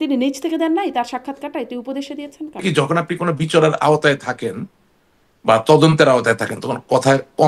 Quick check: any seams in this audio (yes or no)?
yes